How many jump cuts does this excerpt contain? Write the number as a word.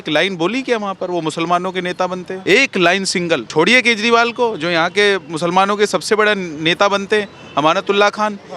two